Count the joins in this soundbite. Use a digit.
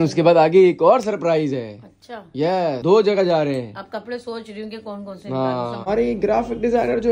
1